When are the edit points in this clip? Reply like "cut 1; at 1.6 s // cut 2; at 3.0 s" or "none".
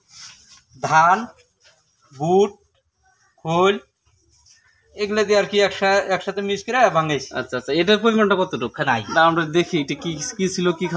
cut 1; at 8.8 s

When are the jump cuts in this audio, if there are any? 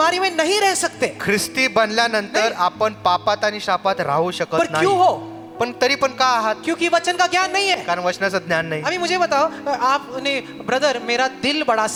none

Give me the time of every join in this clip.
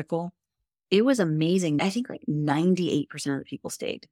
cut 1; at 1.8 s

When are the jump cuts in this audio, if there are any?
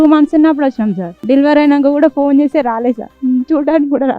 cut 1; at 1.1 s // cut 2; at 3.1 s

